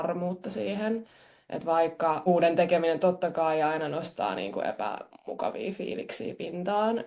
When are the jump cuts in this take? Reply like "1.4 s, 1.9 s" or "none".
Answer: 2.2 s

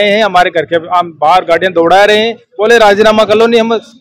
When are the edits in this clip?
none

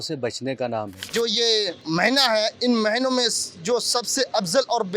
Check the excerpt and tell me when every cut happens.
1.1 s, 1.8 s

